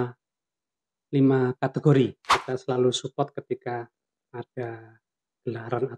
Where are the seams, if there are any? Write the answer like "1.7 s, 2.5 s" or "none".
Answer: 2.2 s